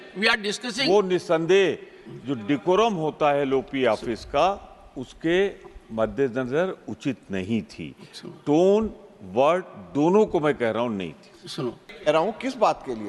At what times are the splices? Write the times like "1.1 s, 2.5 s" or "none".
11.8 s